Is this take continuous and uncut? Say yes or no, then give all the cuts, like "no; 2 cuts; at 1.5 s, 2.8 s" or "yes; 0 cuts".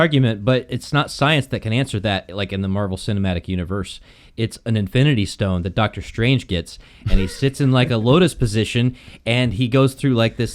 yes; 0 cuts